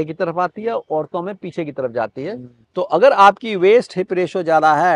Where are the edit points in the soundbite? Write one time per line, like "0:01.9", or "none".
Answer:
0:02.5